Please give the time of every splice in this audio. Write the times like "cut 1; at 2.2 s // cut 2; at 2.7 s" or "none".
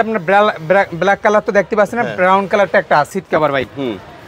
cut 1; at 3.1 s